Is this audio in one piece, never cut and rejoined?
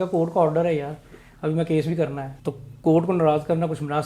no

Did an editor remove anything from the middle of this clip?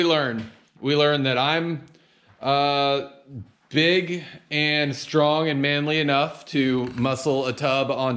no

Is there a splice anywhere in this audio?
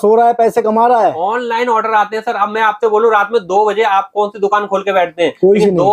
no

